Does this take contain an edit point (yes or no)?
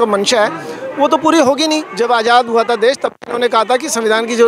yes